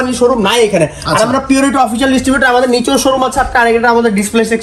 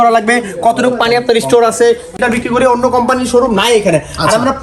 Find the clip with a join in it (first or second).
second